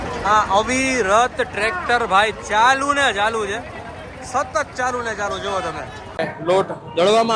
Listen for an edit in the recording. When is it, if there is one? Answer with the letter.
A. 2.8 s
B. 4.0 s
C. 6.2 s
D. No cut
C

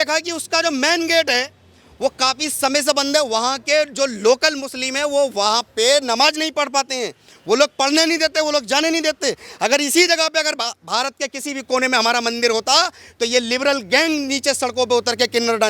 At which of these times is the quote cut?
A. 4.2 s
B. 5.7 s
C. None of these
C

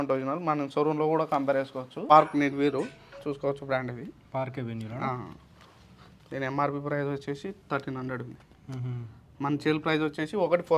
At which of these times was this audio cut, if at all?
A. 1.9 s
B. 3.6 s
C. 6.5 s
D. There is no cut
A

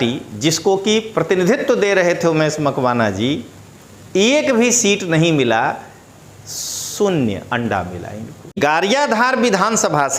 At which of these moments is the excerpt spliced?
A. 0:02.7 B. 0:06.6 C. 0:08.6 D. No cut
C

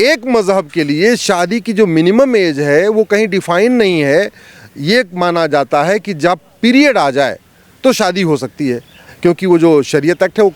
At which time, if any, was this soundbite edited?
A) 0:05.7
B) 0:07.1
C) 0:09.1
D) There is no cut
C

